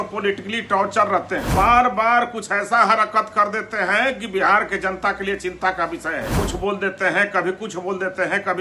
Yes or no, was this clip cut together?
yes